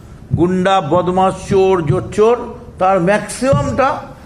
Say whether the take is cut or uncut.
uncut